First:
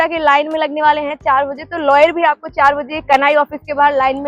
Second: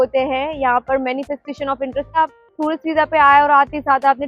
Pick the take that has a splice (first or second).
second